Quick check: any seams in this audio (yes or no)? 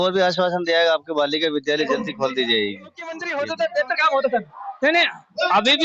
yes